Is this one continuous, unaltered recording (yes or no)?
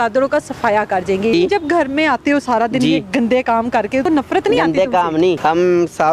no